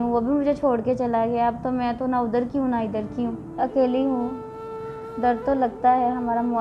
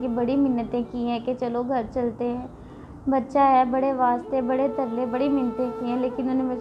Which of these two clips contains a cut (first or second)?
first